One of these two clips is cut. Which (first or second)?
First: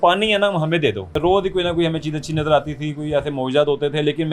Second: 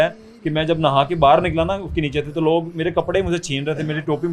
first